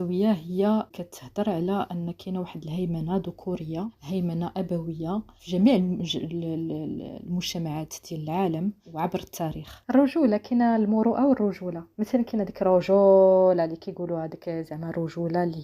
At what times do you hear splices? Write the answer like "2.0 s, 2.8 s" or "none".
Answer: 0.9 s, 4.0 s, 5.4 s, 8.8 s, 9.7 s